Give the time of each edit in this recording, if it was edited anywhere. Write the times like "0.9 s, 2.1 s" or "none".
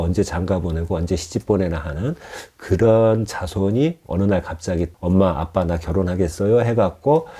4.0 s, 4.9 s